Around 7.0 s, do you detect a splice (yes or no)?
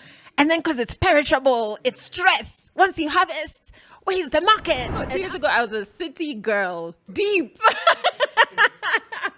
yes